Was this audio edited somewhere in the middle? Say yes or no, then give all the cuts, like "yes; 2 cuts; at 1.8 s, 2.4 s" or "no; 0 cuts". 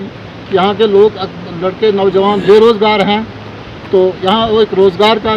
no; 0 cuts